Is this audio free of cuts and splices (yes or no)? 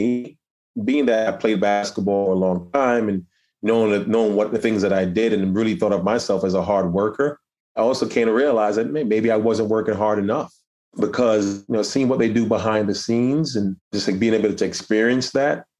no